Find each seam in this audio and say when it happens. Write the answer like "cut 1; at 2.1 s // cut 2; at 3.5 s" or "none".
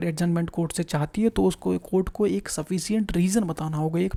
none